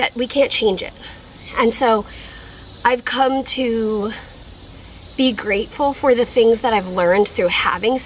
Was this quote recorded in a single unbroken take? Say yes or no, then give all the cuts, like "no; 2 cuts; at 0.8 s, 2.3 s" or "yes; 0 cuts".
yes; 0 cuts